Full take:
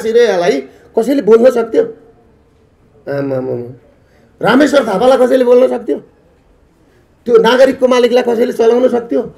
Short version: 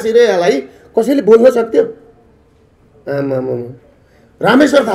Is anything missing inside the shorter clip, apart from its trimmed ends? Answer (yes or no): no